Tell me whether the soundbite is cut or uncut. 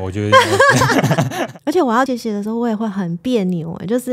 cut